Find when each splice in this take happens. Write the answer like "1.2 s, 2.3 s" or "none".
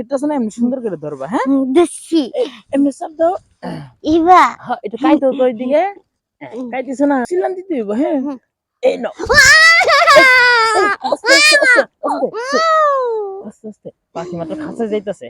7.3 s